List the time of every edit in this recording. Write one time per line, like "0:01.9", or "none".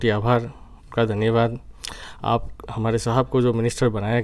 none